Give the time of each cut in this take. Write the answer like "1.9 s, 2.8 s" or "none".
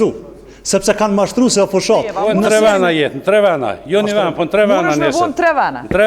2.3 s